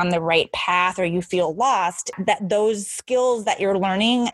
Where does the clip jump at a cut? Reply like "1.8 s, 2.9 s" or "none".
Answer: 2.1 s